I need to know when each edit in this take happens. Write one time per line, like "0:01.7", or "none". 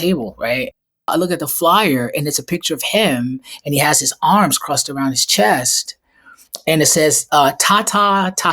0:01.1